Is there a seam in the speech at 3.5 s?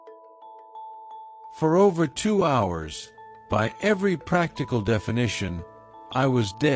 no; 1 cut; at 1.5 s

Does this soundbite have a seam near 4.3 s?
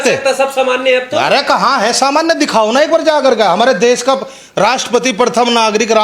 no; 0 cuts

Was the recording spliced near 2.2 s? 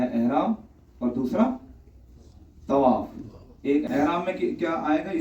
no; 1 cut; at 3.9 s

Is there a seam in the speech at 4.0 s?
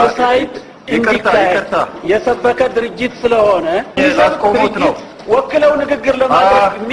yes; 1 cut; at 4.0 s

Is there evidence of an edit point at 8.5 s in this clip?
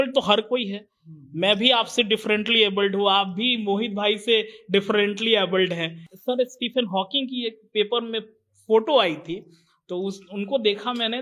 no; 1 cut; at 6.0 s

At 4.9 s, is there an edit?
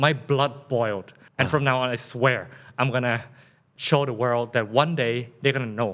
no; 2 cuts; at 1.2 s, 3.7 s

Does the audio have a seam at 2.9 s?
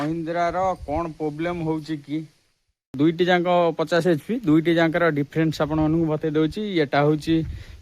yes; 1 cut; at 2.9 s

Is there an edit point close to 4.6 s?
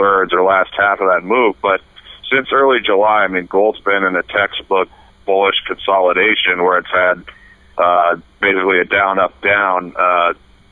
yes; 1 cut; at 4.6 s

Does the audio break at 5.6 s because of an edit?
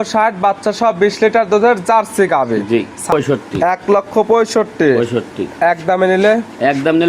no; 1 cut; at 3.1 s

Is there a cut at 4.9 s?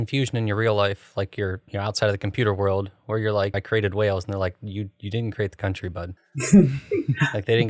no; 2 cuts; at 3.6 s, 6.2 s

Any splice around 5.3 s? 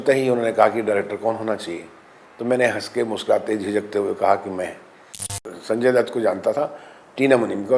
yes; 1 cut; at 5.3 s

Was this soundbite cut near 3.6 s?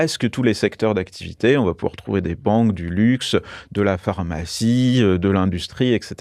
no; 0 cuts

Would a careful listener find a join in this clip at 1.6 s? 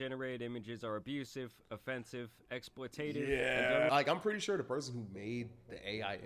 no; 1 cut; at 3.9 s

